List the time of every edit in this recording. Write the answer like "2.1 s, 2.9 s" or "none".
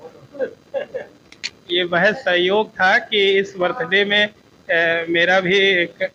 none